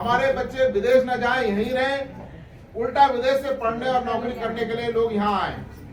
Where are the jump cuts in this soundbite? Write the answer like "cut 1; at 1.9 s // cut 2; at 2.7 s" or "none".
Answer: none